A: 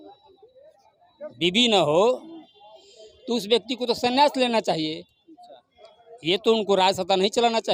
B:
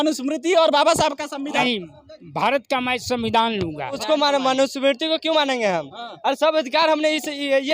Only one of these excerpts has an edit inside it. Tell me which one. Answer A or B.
B